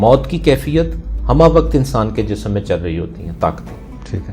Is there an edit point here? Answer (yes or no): no